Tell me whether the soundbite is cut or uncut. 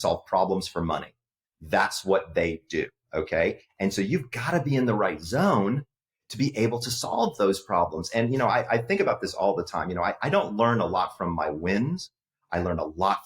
uncut